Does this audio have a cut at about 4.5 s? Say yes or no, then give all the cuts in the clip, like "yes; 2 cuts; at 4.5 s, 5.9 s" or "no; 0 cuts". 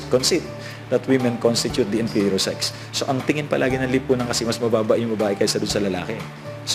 yes; 1 cut; at 4.5 s